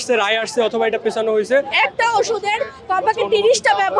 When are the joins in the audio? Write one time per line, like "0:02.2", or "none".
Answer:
0:01.7